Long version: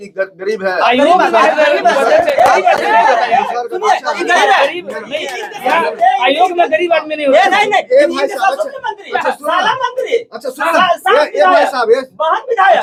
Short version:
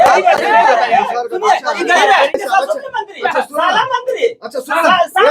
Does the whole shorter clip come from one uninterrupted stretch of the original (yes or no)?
no